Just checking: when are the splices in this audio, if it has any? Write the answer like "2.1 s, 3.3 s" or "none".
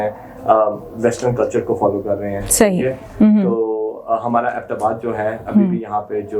none